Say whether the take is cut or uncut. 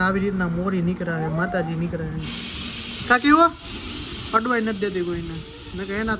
uncut